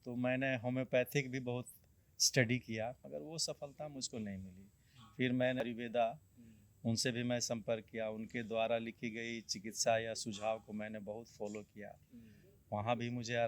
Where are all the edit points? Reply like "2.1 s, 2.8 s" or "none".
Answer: 3.1 s, 5.6 s